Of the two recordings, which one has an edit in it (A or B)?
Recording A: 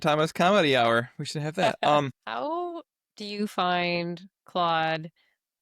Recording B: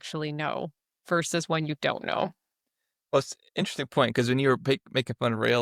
A